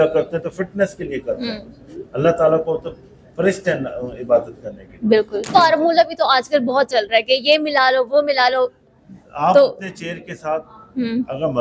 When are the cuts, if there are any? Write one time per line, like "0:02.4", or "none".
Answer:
0:05.5